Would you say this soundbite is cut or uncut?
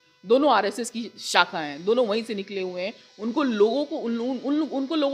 uncut